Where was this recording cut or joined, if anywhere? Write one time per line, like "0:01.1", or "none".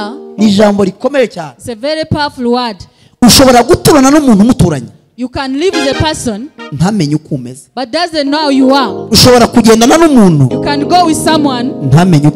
none